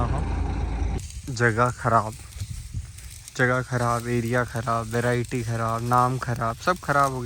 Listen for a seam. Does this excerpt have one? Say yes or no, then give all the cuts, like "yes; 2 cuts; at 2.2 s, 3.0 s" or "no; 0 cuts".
yes; 1 cut; at 1.0 s